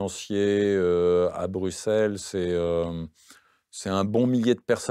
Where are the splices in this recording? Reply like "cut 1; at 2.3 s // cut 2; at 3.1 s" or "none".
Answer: none

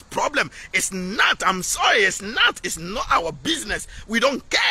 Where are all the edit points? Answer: none

